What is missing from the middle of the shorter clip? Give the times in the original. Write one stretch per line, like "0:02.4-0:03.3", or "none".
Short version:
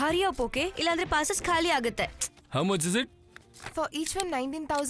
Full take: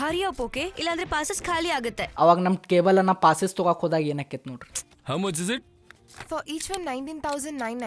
0:02.0-0:04.6